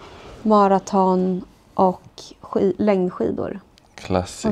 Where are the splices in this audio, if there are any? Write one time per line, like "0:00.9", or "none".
none